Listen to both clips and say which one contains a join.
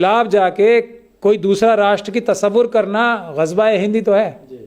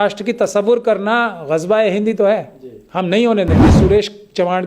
second; 1 cut; at 3.7 s

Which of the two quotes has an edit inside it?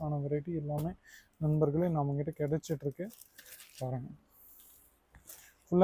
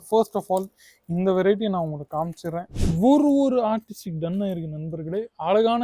second; 1 cut; at 2.7 s

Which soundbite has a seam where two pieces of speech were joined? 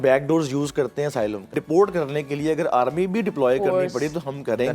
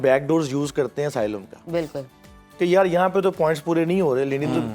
first; 1 cut; at 1.5 s

